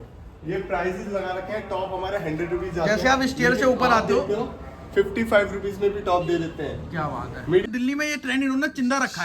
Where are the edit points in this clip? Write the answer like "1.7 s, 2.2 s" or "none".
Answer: 7.6 s